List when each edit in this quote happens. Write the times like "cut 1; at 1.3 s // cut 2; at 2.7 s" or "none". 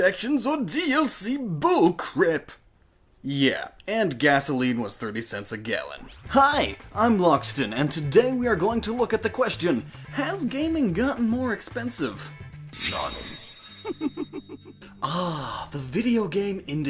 cut 1; at 11.0 s